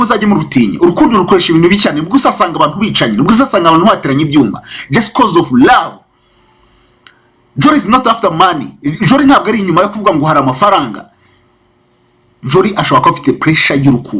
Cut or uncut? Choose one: uncut